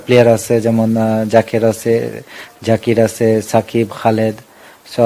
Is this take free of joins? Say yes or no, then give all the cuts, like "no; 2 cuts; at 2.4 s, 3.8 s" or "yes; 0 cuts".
yes; 0 cuts